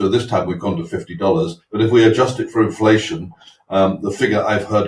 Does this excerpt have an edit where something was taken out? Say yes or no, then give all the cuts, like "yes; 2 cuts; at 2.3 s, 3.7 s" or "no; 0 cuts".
yes; 1 cut; at 1.6 s